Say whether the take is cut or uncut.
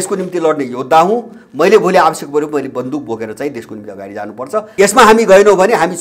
cut